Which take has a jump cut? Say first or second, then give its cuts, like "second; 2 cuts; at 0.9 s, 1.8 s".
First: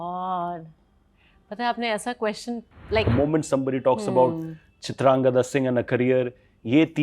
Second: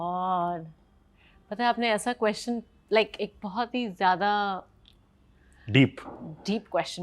first; 1 cut; at 3.1 s